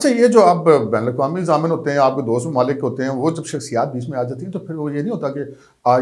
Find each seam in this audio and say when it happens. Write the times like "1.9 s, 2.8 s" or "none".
none

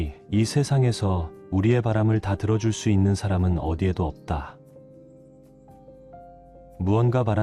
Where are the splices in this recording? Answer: 4.5 s, 6.3 s

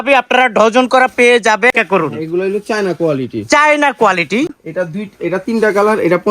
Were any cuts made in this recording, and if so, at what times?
1.7 s, 4.5 s

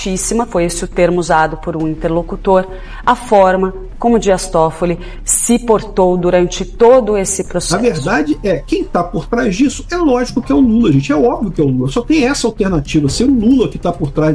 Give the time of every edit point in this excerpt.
7.7 s

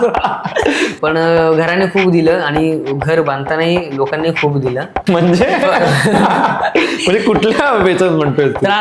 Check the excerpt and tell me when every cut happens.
0.9 s, 5.0 s

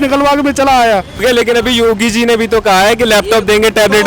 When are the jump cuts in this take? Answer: 1.2 s

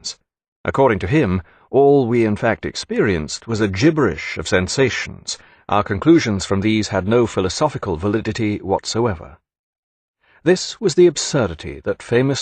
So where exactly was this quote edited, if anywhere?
1.2 s

